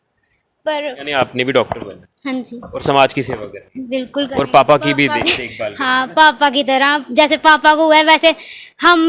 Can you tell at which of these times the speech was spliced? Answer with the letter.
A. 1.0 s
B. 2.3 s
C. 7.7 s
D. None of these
A